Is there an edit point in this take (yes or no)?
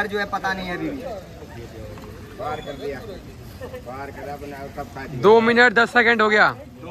no